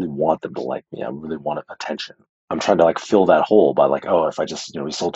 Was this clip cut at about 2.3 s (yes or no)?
yes